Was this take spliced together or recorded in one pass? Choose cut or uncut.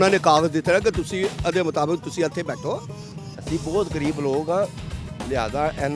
cut